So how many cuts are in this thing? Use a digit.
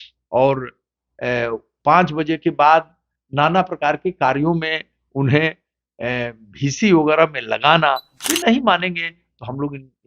1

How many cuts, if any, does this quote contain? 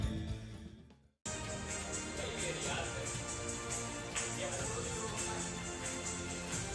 1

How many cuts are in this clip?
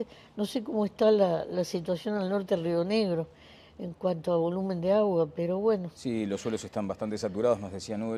0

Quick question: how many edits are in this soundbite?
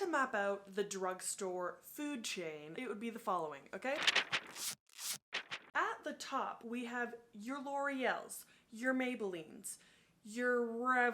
2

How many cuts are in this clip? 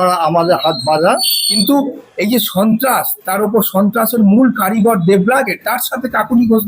2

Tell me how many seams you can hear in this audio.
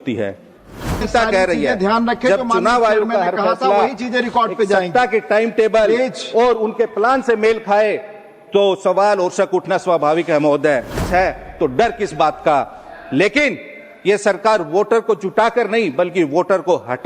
2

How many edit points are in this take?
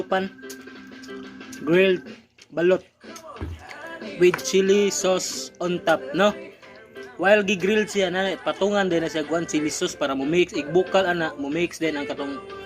0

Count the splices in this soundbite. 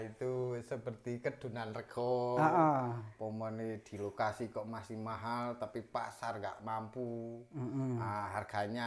0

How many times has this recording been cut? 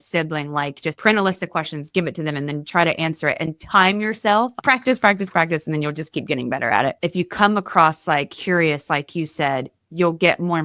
2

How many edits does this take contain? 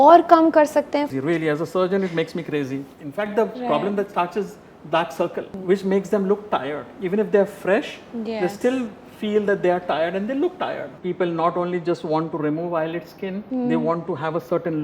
5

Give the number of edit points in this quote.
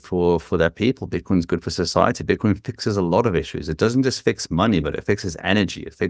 0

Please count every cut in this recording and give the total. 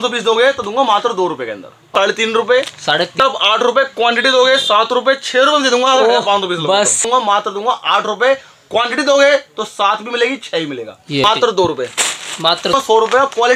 5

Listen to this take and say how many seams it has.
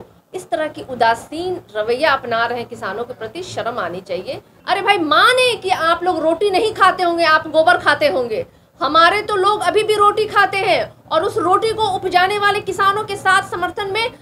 1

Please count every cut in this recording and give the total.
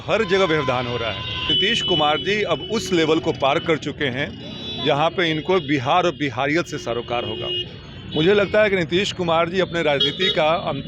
1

